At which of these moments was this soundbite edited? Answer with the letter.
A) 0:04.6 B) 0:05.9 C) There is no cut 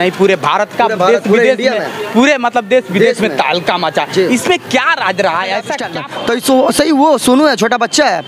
B